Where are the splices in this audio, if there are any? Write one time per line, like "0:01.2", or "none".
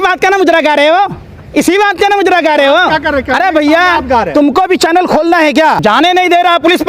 0:05.8